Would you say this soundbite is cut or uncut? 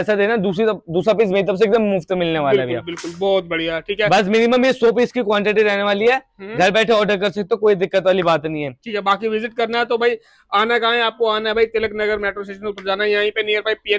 uncut